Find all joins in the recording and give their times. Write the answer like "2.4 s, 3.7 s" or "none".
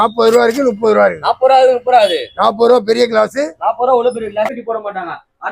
4.5 s